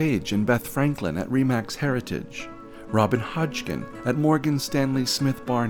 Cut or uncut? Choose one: uncut